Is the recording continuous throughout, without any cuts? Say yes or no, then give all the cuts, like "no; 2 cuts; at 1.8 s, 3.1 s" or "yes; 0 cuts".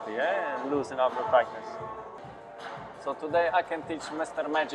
no; 1 cut; at 2.2 s